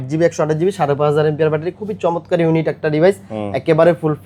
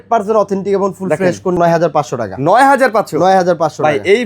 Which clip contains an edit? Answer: second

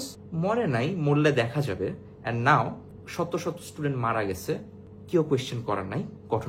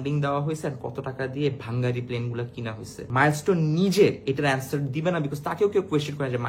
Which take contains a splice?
second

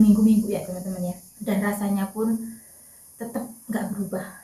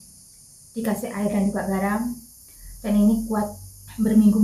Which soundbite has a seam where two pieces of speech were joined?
first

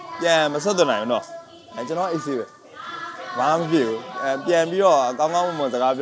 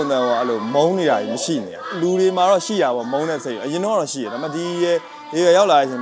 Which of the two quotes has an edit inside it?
second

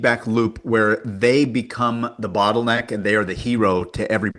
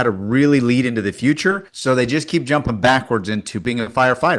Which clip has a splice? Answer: second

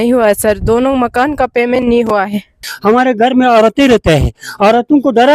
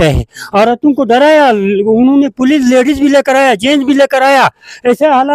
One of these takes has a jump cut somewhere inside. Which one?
first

